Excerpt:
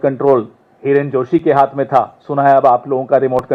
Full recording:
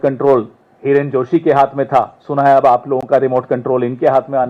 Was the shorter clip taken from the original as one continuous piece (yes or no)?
yes